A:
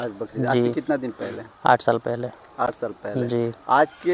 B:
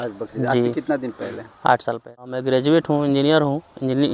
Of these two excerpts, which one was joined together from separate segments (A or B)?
B